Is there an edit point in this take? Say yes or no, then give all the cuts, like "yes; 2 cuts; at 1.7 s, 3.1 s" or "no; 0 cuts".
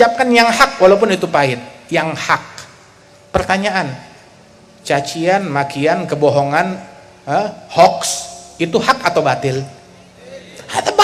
no; 0 cuts